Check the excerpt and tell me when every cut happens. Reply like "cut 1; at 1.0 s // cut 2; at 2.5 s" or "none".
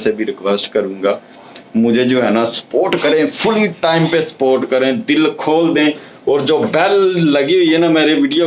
none